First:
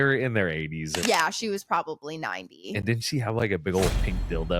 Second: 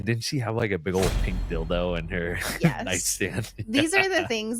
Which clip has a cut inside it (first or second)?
first